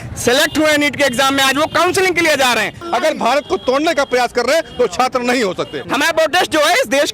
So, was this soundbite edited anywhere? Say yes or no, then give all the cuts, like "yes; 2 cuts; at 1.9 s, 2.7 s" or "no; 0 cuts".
yes; 2 cuts; at 2.8 s, 5.8 s